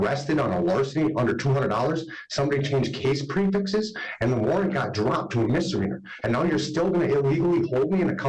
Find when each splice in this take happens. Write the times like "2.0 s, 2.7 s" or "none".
none